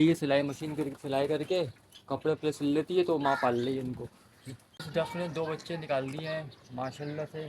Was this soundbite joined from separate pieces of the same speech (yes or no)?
yes